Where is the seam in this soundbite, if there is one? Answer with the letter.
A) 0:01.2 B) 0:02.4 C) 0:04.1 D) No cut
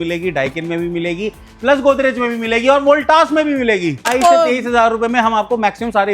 C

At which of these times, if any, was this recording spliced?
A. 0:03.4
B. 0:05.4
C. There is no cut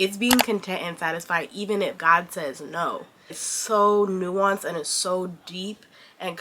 A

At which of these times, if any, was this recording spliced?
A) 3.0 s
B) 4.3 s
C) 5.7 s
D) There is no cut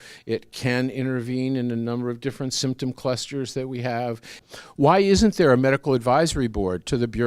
B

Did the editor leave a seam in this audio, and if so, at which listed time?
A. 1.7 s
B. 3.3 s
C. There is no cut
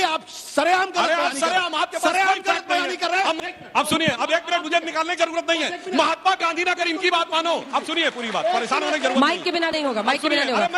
B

